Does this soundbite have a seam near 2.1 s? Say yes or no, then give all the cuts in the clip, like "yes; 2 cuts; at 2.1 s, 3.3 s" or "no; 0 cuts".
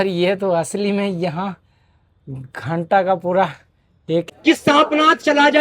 no; 1 cut; at 4.2 s